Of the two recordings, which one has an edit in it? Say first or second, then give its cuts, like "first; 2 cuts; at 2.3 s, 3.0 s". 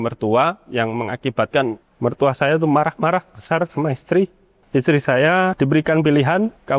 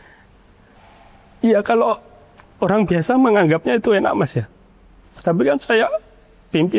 first; 1 cut; at 4.5 s